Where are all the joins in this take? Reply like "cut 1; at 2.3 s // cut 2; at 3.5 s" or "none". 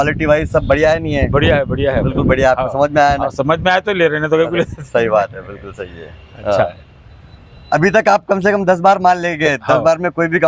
none